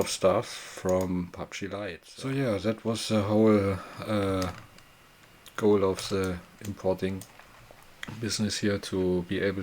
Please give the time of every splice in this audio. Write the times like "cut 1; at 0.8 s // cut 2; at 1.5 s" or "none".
cut 1; at 1.7 s